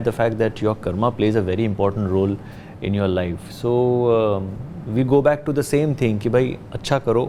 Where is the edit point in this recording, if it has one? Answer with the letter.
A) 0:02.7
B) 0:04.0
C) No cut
C